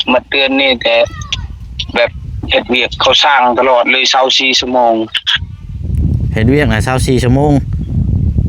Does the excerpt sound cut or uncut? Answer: uncut